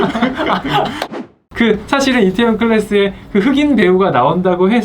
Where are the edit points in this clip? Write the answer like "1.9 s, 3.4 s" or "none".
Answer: 1.1 s